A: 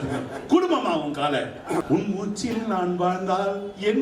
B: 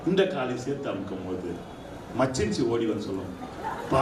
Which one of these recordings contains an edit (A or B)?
A